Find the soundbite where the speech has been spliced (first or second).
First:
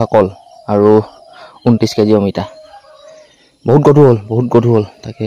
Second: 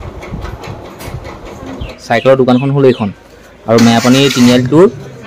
second